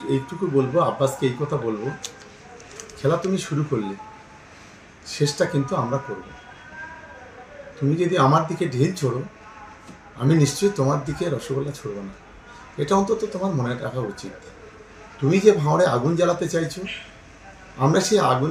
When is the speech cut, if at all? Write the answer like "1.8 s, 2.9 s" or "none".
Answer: none